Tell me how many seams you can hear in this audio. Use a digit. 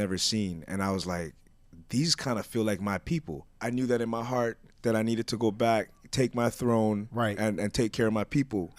1